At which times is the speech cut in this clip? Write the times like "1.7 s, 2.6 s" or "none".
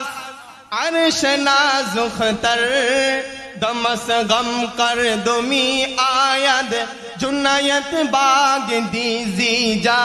none